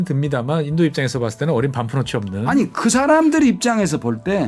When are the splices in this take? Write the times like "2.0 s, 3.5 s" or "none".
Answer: none